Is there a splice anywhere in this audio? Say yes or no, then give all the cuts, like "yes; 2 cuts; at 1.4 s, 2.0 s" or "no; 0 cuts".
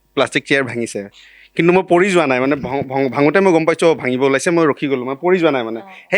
no; 0 cuts